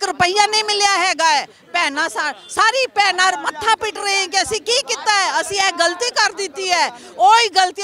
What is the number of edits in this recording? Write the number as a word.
zero